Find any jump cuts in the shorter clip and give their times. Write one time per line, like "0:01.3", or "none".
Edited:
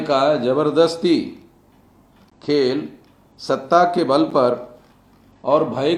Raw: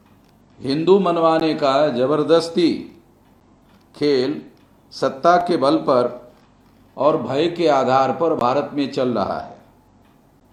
none